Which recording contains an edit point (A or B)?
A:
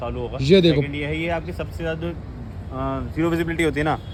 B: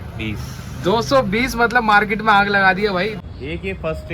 B